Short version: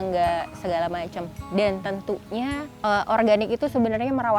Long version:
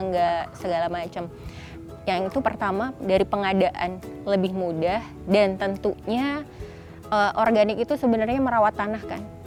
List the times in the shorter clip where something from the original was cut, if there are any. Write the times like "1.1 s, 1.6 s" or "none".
1.4 s, 2.7 s